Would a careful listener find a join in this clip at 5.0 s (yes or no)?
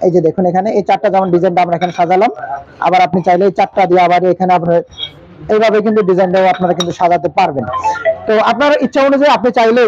no